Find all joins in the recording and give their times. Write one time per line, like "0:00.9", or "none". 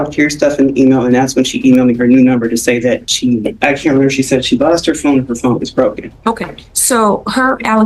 none